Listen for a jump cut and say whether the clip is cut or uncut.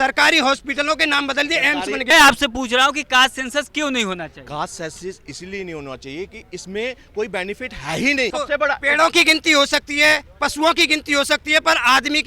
cut